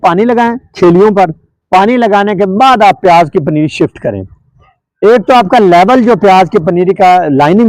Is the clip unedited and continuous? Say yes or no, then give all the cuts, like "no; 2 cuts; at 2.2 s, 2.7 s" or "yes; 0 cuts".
yes; 0 cuts